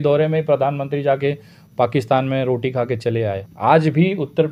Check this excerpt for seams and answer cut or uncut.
cut